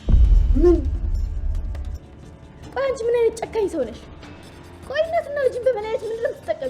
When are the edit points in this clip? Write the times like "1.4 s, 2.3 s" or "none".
2.0 s